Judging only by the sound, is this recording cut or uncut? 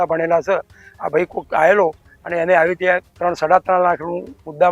uncut